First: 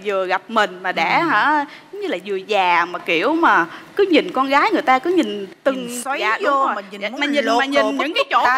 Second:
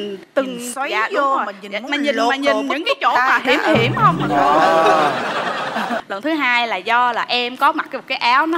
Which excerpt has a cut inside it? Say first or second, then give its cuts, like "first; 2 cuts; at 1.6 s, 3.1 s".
second; 1 cut; at 6.0 s